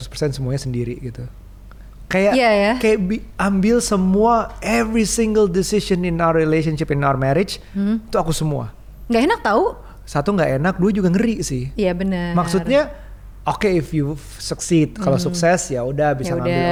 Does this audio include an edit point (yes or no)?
no